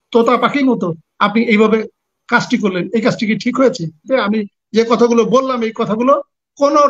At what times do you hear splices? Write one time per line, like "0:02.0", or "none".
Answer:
0:04.1